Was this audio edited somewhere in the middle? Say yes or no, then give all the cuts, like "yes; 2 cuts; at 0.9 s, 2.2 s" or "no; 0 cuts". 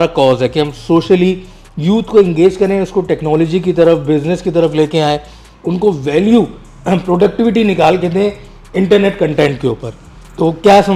no; 0 cuts